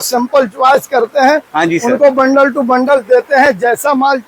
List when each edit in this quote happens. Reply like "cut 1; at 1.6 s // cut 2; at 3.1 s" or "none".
none